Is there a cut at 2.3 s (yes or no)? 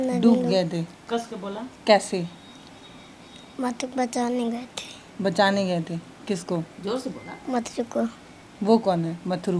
no